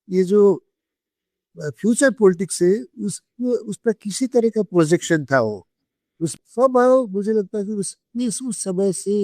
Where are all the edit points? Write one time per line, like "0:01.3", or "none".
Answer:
0:06.3